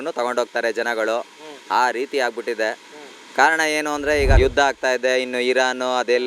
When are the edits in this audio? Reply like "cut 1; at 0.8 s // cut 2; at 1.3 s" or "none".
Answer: cut 1; at 4.4 s